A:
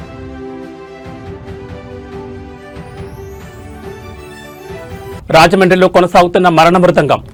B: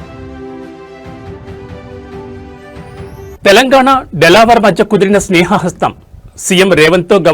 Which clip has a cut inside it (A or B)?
B